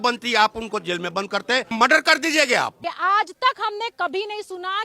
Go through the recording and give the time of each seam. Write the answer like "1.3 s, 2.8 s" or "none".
1.7 s, 2.8 s